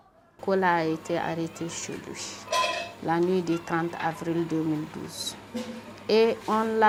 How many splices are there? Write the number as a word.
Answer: zero